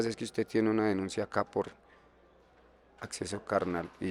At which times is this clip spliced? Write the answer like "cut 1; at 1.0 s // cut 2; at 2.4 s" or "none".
none